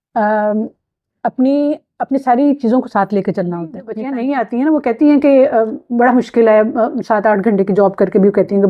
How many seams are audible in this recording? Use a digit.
1